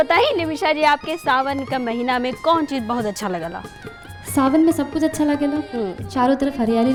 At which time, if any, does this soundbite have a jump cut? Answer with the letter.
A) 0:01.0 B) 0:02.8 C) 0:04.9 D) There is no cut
D